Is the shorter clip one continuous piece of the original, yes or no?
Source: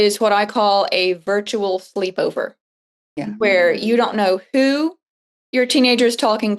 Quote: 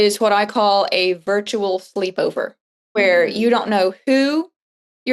no